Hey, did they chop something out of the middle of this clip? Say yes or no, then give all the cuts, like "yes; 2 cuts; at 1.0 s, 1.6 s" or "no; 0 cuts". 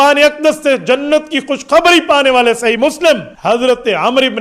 yes; 1 cut; at 3.3 s